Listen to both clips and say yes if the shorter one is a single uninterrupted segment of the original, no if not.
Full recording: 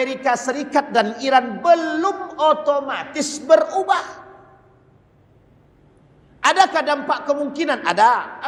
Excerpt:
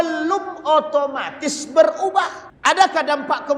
no